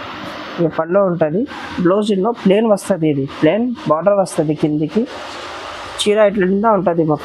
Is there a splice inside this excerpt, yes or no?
no